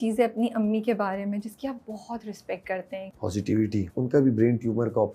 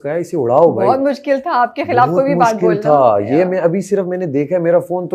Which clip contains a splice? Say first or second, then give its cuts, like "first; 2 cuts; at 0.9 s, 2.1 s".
first; 2 cuts; at 3.1 s, 4.0 s